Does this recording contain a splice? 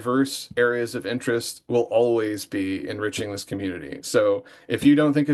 no; 0 cuts

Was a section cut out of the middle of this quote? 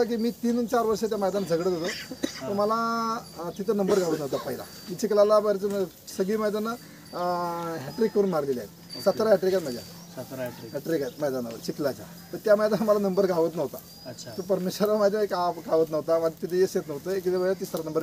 no; 0 cuts

